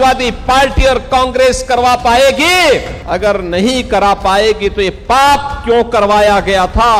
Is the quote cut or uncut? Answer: uncut